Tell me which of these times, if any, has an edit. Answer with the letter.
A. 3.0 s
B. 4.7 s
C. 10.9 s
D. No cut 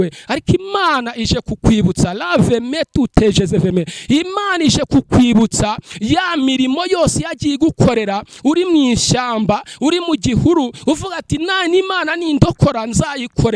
D